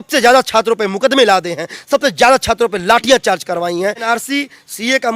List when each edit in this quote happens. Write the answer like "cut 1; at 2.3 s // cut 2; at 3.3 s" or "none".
cut 1; at 4.1 s